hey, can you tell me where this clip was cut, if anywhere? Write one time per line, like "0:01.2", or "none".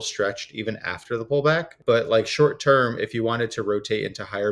0:01.8